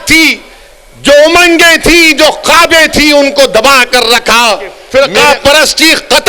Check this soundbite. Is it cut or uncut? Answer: cut